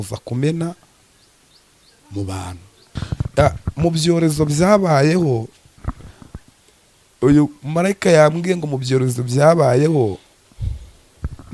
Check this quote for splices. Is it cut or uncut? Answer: cut